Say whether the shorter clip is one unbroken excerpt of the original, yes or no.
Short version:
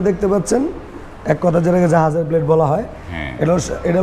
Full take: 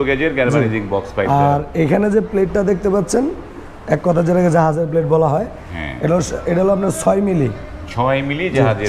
yes